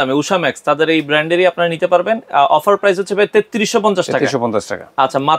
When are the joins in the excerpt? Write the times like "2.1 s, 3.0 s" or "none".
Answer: none